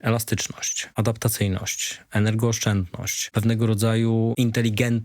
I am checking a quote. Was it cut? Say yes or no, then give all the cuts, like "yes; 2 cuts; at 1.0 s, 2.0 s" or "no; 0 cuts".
yes; 3 cuts; at 0.9 s, 3.3 s, 4.3 s